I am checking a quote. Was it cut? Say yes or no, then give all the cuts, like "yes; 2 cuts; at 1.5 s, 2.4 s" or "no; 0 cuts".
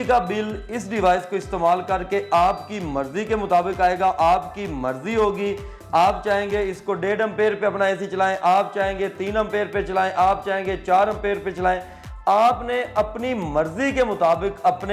no; 0 cuts